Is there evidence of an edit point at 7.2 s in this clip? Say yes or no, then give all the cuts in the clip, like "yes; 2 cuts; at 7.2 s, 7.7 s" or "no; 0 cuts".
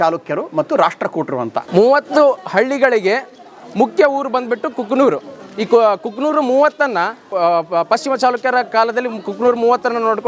yes; 2 cuts; at 1.7 s, 7.2 s